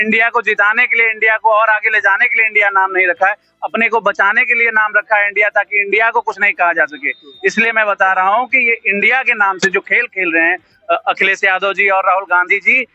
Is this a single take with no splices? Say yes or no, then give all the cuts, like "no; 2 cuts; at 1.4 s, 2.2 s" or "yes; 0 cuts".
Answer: yes; 0 cuts